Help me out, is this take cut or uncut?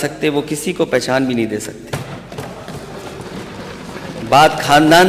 uncut